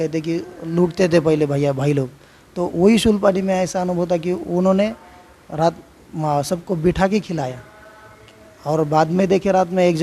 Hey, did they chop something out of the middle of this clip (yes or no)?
no